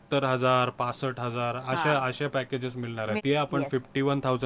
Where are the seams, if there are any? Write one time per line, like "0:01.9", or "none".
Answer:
0:03.1

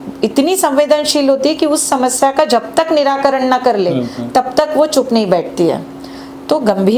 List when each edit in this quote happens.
none

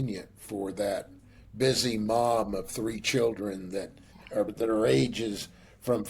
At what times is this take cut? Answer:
0:04.4

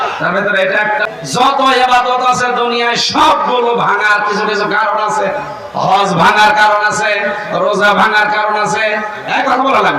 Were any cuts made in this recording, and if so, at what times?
0:01.0

